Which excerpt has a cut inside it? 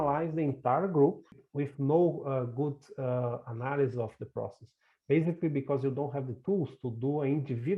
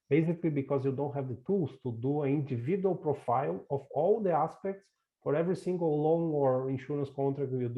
first; 1 cut; at 1.4 s

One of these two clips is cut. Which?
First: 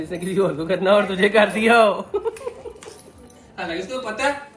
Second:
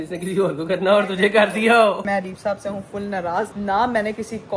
second; 2 cuts; at 2.1 s, 3.5 s

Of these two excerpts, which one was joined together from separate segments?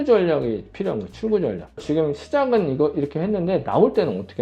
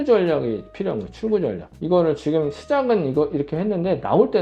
first; 1 cut; at 1.8 s

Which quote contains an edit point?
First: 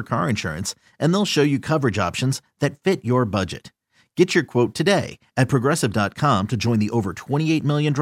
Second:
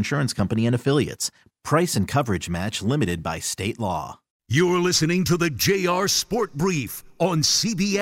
second; 1 cut; at 4.4 s

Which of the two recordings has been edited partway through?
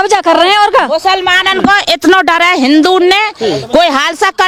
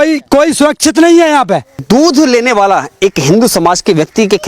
second; 1 cut; at 1.8 s

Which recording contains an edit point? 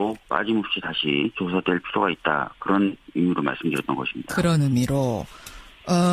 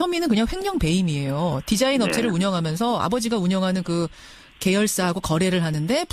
first; 1 cut; at 4.1 s

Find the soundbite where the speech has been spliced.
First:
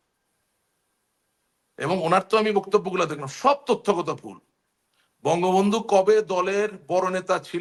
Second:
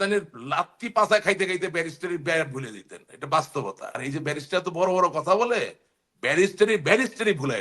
second; 1 cut; at 3.9 s

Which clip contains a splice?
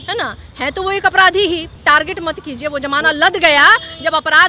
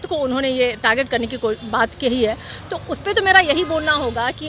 first; 1 cut; at 1.7 s

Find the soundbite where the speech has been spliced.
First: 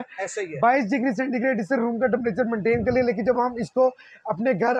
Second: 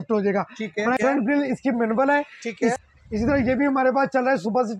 second; 2 cuts; at 1.0 s, 2.7 s

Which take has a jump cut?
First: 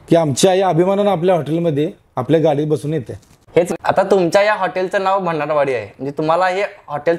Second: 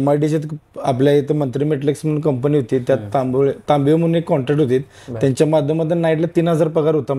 first; 1 cut; at 3.7 s

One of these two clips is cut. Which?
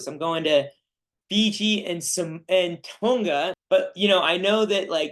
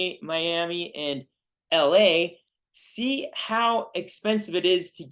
first; 1 cut; at 3.5 s

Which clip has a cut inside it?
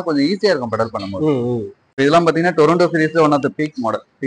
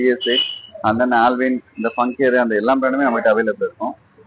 first; 1 cut; at 1.8 s

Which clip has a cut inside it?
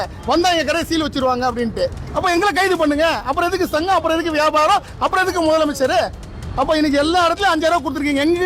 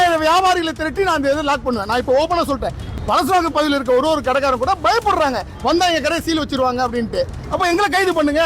second; 1 cut; at 2.8 s

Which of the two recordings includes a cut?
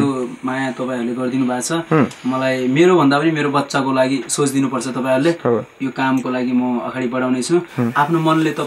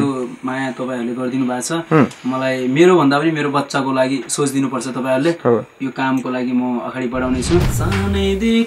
second; 1 cut; at 7.7 s

